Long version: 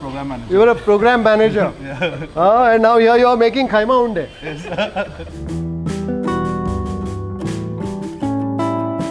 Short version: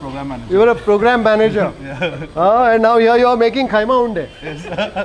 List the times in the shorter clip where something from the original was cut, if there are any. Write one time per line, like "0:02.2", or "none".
none

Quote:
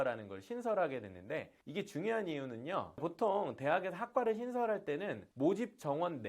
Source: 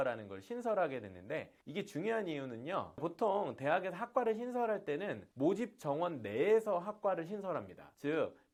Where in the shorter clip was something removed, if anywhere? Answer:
none

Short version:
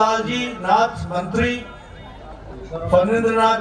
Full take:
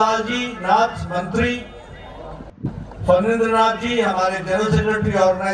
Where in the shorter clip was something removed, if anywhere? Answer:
0:02.6

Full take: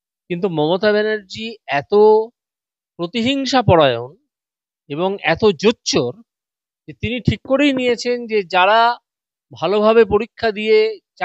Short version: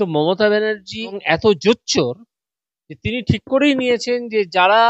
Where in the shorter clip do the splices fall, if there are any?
0:01.2

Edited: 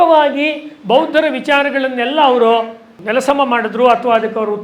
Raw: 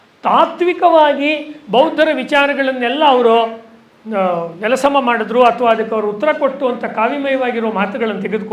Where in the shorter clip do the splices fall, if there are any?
0:03.0

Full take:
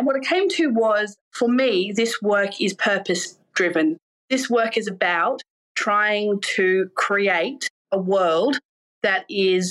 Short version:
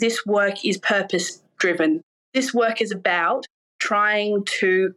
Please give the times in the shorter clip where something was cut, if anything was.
none

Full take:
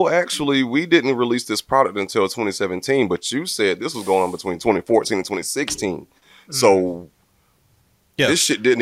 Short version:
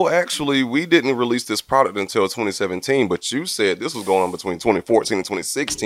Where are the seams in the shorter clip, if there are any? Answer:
none

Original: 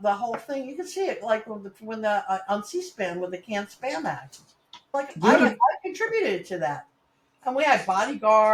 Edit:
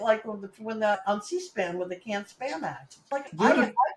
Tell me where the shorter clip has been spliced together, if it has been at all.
0:00.9
0:02.9

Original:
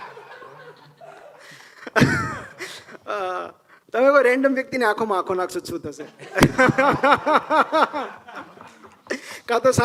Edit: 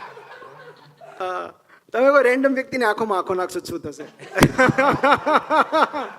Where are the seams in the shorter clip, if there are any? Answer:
0:01.2

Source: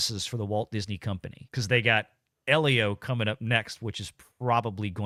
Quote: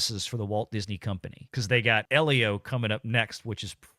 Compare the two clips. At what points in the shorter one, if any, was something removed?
0:02.1

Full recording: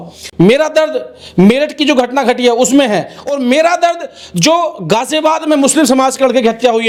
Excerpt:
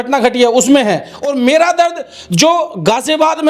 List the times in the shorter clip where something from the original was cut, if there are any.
none

